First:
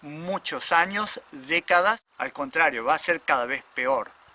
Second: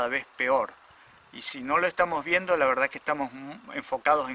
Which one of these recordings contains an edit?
first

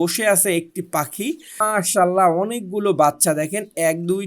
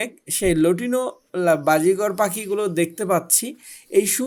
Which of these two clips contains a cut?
first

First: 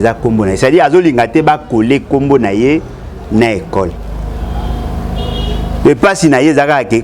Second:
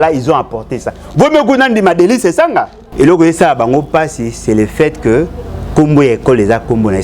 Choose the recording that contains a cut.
second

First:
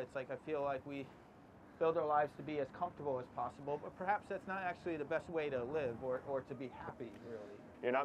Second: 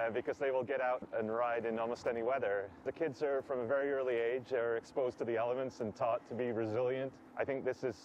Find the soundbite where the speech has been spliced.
second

